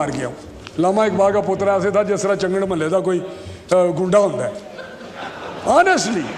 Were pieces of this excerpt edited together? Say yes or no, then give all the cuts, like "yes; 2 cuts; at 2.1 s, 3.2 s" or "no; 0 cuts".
no; 0 cuts